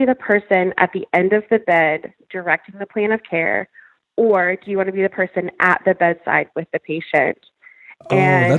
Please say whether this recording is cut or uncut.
uncut